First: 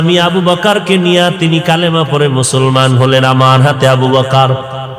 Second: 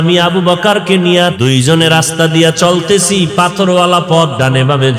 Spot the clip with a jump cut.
second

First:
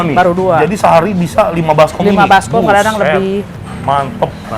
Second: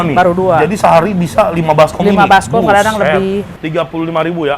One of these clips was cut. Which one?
second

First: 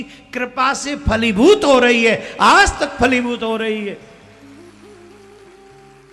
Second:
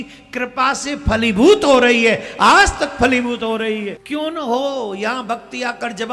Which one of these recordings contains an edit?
second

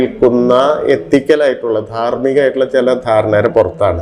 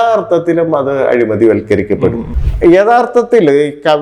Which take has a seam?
second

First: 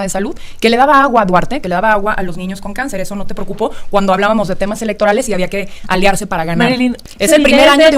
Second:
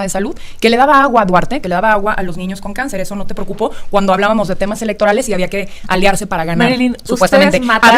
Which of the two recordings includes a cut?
first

